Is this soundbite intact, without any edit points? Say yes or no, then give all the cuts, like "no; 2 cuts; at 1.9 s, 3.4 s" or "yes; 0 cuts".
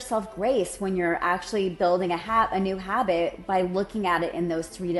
yes; 0 cuts